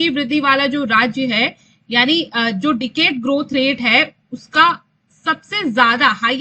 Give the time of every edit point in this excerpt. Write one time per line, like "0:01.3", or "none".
none